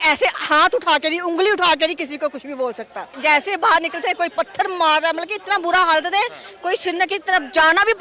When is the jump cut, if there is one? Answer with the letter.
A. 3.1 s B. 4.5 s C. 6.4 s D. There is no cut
A